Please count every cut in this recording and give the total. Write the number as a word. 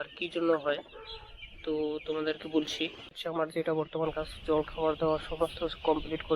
one